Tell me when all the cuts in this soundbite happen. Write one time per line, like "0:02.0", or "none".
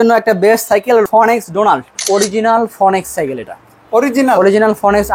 0:01.1
0:01.9